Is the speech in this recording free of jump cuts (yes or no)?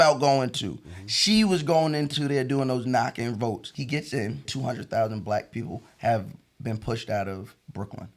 no